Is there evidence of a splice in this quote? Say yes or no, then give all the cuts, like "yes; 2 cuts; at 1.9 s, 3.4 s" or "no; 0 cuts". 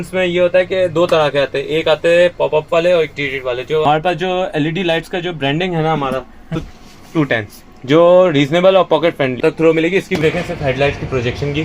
yes; 4 cuts; at 3.8 s, 6.6 s, 9.4 s, 10.2 s